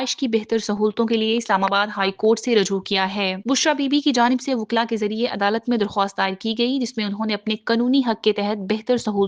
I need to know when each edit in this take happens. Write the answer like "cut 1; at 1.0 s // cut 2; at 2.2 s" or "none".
none